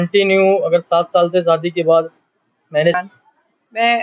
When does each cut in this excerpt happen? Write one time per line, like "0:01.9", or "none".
0:02.9